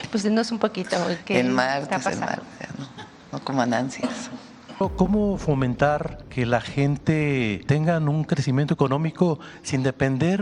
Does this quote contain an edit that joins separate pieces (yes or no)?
yes